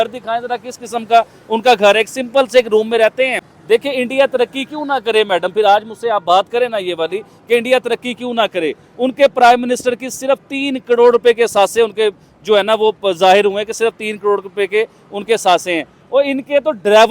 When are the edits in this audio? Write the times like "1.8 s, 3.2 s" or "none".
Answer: 3.5 s